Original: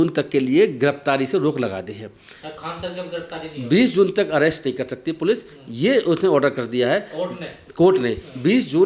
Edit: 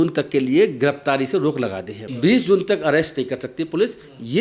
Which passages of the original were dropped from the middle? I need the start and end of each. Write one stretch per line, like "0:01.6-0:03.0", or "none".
0:02.0-0:03.5